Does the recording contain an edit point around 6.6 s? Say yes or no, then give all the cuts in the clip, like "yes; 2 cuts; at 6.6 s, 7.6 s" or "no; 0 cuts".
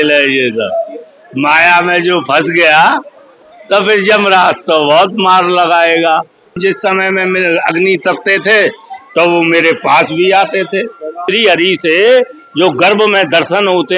yes; 2 cuts; at 6.6 s, 11.2 s